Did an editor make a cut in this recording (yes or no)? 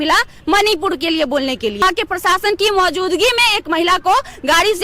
yes